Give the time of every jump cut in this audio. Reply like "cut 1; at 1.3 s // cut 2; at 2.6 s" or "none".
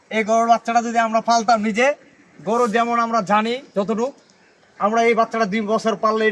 none